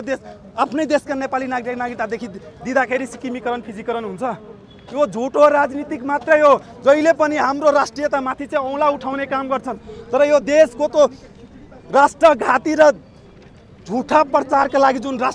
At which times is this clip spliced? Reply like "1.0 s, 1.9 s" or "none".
none

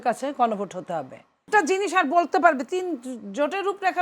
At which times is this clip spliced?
1.4 s

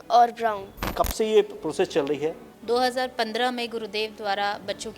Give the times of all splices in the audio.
0.9 s, 2.5 s

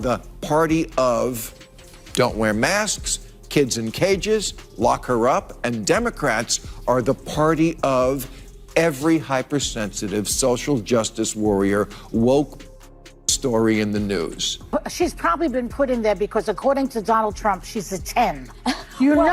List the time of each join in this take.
14.5 s

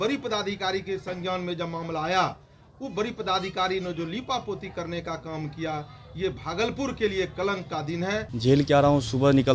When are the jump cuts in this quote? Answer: 8.3 s

